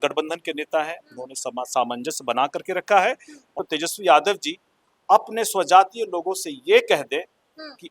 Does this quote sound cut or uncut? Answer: cut